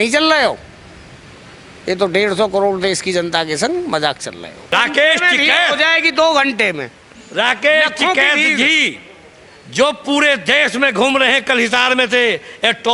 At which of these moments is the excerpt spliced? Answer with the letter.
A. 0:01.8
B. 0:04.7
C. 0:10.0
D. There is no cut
B